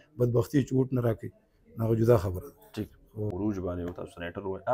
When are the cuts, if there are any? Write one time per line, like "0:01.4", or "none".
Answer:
0:03.3